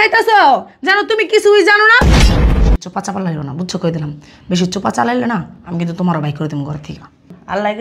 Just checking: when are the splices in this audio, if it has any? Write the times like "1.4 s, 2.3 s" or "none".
2.5 s